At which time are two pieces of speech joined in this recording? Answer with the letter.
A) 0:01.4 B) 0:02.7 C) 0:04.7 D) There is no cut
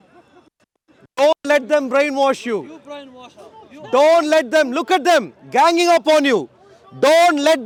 D